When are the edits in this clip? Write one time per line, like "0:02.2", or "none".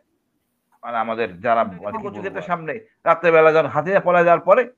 0:02.4